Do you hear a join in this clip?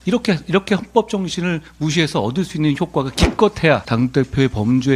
yes; 1 cut; at 3.8 s

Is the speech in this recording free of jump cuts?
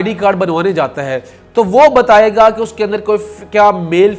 yes; 0 cuts

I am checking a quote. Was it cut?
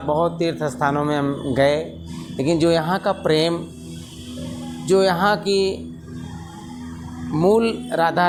no; 0 cuts

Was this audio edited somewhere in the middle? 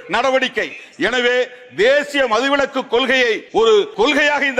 yes; 1 cut; at 3.7 s

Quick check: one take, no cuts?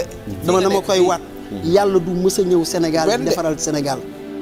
yes; 0 cuts

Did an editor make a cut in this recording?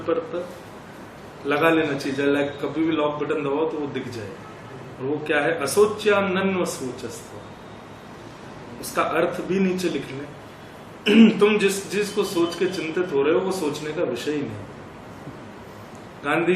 no; 0 cuts

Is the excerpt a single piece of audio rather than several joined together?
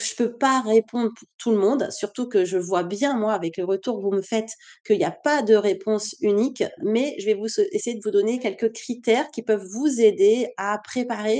yes; 0 cuts

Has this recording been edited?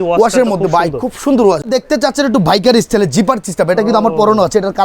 yes; 1 cut; at 1.6 s

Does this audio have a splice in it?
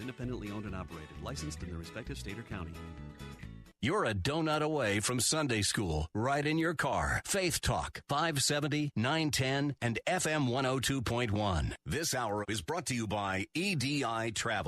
yes; 1 cut; at 3.7 s

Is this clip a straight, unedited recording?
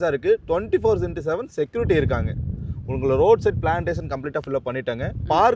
yes; 0 cuts

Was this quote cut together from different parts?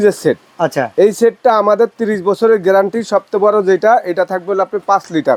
no; 0 cuts

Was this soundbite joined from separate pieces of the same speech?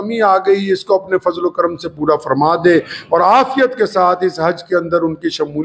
no; 0 cuts

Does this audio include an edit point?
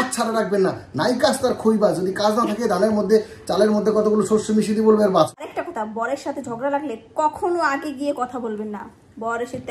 yes; 1 cut; at 5.3 s

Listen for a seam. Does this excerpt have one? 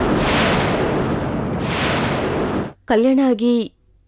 yes; 1 cut; at 2.7 s

